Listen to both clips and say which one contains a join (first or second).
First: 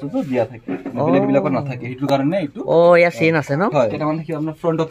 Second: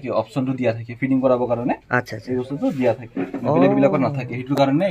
first